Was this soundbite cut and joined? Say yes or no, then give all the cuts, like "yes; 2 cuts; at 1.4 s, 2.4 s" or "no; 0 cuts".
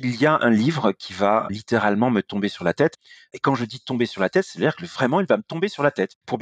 yes; 2 cuts; at 1.5 s, 2.9 s